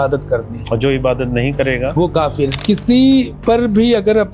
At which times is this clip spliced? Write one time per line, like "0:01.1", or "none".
0:02.6
0:03.3